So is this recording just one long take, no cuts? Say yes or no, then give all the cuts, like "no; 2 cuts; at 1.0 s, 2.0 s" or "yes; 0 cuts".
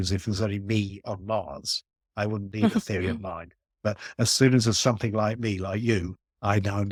yes; 0 cuts